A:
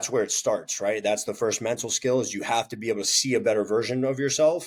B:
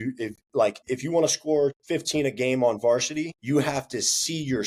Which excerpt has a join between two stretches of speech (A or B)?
B